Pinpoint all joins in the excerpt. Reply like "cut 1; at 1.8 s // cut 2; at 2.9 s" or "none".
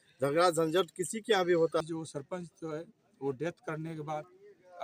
cut 1; at 1.9 s